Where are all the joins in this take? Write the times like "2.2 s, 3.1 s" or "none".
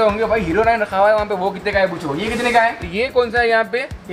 2.9 s